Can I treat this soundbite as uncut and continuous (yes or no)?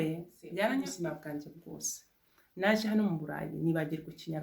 no